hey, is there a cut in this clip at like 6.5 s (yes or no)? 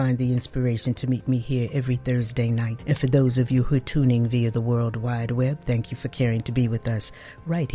no